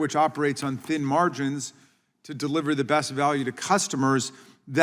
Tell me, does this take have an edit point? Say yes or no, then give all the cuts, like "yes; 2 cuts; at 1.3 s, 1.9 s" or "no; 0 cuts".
no; 0 cuts